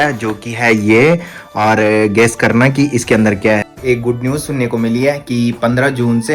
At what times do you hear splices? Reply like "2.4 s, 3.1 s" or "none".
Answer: 3.7 s